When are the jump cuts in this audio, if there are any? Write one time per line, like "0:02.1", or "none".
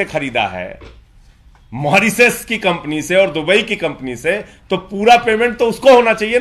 none